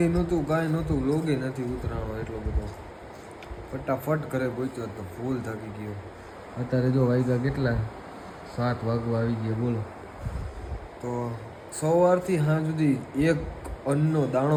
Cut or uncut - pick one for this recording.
uncut